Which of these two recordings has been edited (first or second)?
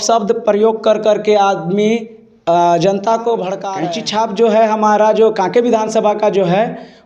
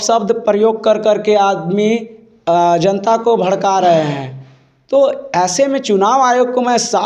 first